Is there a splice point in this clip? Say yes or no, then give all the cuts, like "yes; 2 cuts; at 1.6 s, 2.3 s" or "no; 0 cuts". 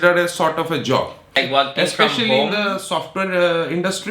yes; 1 cut; at 1.4 s